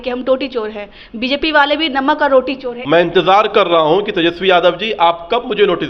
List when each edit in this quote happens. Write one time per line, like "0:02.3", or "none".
0:02.7